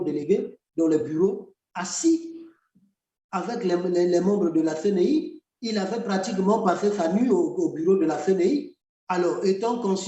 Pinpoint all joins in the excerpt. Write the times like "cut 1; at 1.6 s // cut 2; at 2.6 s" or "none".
none